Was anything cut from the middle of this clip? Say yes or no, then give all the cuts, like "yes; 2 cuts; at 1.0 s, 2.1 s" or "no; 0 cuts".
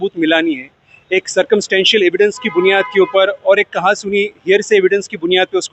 no; 0 cuts